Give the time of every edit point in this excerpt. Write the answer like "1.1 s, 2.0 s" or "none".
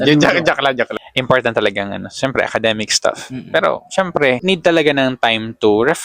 0.9 s, 4.4 s